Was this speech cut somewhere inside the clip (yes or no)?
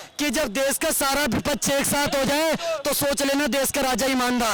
no